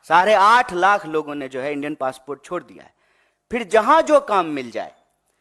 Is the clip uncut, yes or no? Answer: yes